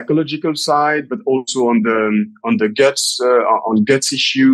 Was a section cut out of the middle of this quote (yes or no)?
no